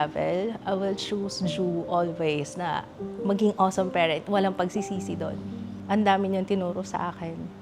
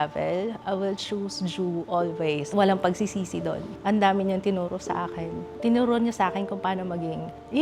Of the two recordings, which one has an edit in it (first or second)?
second